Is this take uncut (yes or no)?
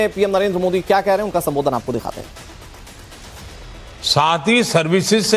yes